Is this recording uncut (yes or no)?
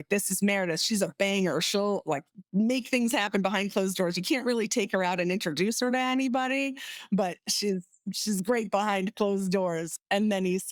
yes